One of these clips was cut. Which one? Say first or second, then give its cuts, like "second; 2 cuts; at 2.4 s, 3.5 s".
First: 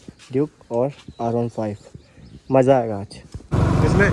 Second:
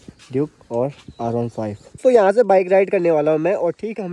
second; 1 cut; at 1.9 s